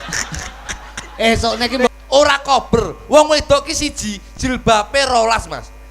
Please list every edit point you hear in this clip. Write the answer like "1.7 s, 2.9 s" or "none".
1.9 s